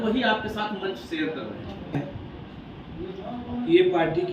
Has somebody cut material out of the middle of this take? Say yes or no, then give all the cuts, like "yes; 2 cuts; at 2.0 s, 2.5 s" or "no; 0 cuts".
yes; 1 cut; at 1.9 s